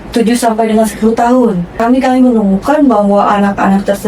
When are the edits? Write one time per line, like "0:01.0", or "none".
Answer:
0:01.8